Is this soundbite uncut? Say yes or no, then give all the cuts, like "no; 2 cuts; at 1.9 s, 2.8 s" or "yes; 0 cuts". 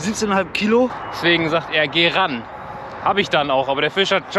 no; 1 cut; at 0.9 s